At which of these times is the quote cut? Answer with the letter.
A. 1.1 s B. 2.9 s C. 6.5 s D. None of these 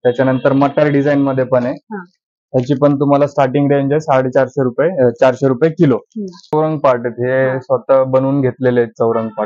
C